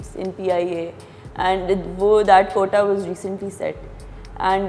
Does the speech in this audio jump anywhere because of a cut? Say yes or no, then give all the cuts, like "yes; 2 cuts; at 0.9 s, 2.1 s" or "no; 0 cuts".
no; 0 cuts